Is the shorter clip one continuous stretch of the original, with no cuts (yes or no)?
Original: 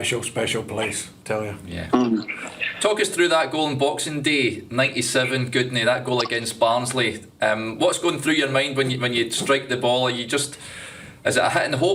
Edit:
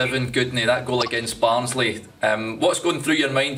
yes